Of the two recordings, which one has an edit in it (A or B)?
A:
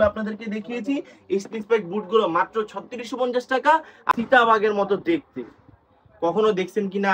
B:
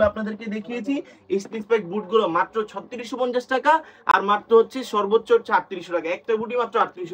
A